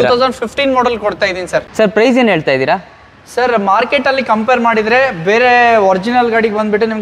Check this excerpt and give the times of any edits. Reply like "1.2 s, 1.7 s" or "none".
1.7 s